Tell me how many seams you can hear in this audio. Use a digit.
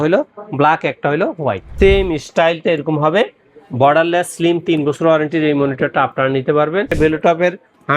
2